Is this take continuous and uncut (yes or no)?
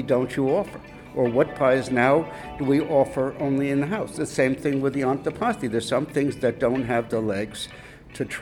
yes